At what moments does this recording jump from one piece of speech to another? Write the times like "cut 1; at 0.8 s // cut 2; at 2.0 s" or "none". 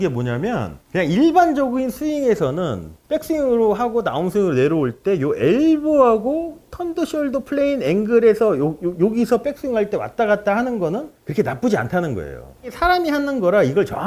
none